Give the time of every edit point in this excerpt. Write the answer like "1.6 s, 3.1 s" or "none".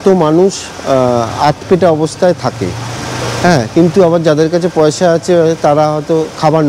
none